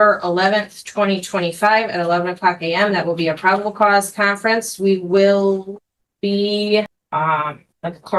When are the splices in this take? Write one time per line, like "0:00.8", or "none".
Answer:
0:07.0